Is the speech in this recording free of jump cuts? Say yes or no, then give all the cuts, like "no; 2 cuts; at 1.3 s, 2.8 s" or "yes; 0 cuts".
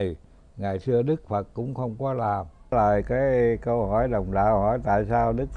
no; 1 cut; at 2.7 s